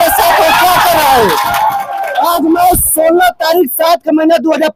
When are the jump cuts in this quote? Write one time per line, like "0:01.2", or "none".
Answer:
none